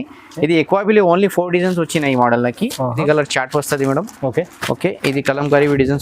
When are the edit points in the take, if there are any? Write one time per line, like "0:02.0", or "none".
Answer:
0:03.0

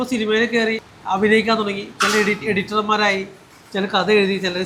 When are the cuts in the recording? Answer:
none

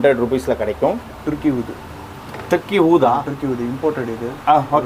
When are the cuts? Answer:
0:01.0

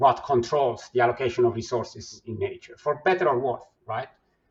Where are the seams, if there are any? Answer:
none

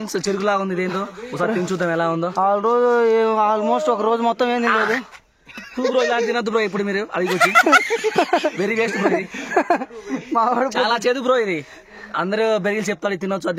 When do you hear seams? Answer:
none

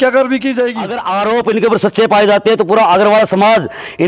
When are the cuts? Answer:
0:01.0

